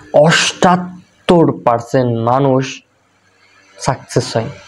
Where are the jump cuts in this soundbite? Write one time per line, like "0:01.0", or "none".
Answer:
none